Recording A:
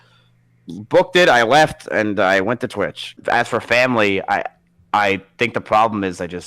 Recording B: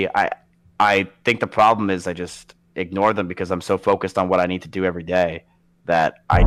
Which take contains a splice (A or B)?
A